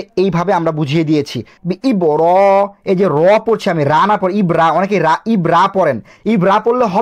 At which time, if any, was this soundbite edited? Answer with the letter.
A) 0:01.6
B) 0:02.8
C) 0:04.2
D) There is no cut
A